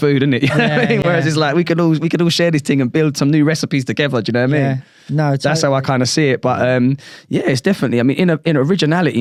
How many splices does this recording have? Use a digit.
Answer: 0